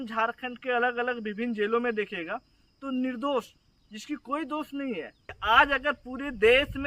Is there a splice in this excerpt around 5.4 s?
yes; 1 cut; at 5.4 s

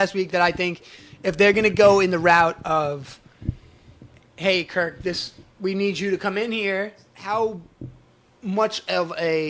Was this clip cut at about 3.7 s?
no; 1 cut; at 7.1 s

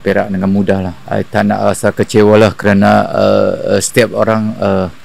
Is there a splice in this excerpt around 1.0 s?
yes; 1 cut; at 1.0 s

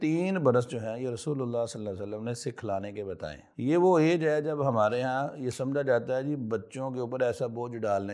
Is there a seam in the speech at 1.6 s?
no; 1 cut; at 3.5 s

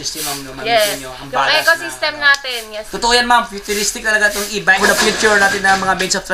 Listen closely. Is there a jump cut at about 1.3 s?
no; 2 cuts; at 2.8 s, 4.8 s

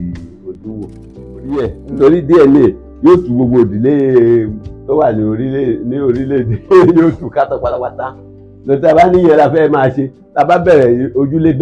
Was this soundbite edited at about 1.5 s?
yes; 1 cut; at 1.5 s

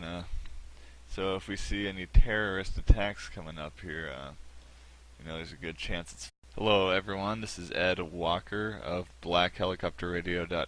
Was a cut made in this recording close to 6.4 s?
no; 0 cuts

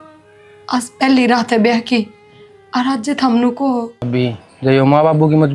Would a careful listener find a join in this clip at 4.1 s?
yes; 1 cut; at 4.1 s

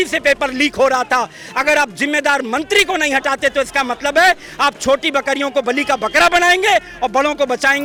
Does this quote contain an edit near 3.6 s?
no; 0 cuts

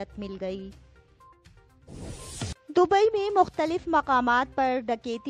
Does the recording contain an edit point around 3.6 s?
no; 1 cut; at 1.3 s

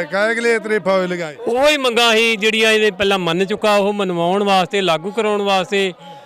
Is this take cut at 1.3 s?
yes; 1 cut; at 1.3 s

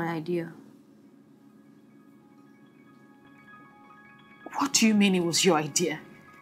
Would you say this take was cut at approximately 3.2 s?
yes; 1 cut; at 3.2 s

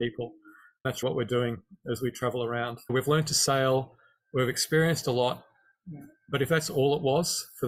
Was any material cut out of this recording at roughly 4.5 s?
no; 2 cuts; at 1.0 s, 2.9 s

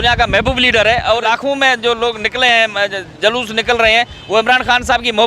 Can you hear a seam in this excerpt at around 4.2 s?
no; 1 cut; at 1.2 s

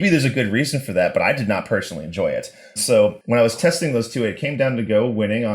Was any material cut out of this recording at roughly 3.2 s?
yes; 1 cut; at 3.2 s

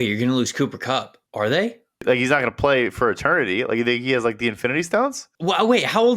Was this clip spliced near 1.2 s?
yes; 3 cuts; at 1.2 s, 2.0 s, 5.3 s

